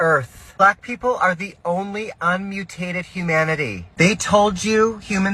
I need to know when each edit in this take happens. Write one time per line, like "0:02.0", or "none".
none